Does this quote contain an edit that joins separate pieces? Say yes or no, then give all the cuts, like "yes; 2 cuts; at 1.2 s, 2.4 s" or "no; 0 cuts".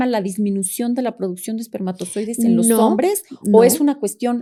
no; 0 cuts